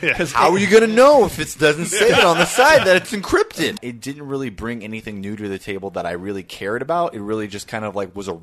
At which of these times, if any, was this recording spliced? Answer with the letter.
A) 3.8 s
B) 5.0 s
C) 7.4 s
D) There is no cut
A